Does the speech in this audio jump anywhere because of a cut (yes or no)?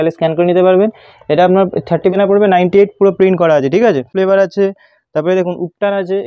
yes